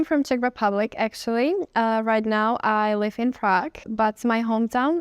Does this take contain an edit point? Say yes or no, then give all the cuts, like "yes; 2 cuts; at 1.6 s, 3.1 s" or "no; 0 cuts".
yes; 1 cut; at 3.8 s